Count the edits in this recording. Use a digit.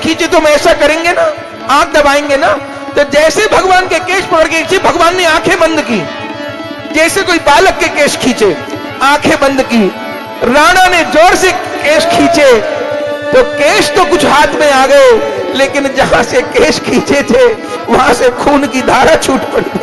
0